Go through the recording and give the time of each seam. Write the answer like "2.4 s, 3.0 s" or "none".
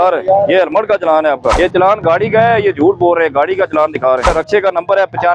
1.6 s, 4.3 s